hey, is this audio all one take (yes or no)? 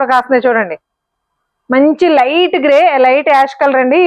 yes